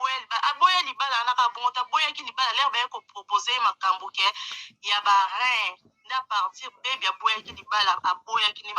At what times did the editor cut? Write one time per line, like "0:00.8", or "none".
none